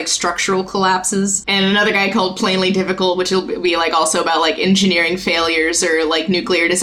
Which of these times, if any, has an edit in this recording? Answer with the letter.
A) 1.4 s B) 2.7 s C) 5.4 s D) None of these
A